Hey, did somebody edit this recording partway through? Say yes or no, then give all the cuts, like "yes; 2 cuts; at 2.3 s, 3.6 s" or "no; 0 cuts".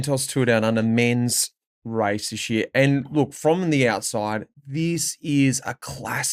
no; 0 cuts